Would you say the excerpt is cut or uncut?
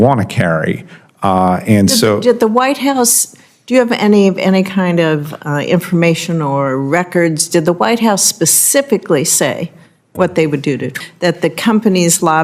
cut